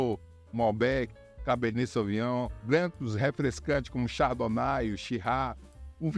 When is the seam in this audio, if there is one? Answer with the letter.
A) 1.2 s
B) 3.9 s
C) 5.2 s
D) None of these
B